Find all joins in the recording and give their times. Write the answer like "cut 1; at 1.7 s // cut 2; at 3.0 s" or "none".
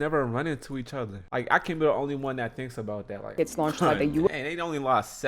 cut 1; at 1.2 s // cut 2; at 3.3 s